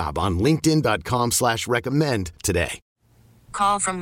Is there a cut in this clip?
yes; 1 cut; at 2.8 s

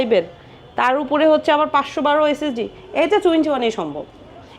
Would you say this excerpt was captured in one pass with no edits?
yes; 0 cuts

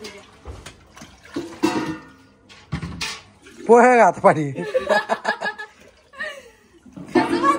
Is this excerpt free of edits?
yes; 0 cuts

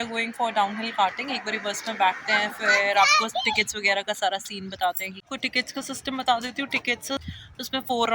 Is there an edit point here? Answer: yes; 2 cuts; at 5.1 s, 7.2 s

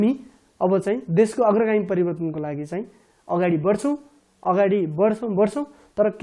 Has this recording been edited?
no; 0 cuts

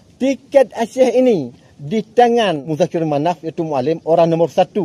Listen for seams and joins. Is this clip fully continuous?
no; 1 cut; at 2.7 s

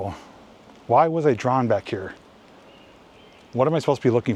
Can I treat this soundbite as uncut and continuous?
yes; 0 cuts

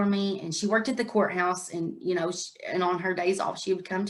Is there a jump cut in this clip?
no; 0 cuts

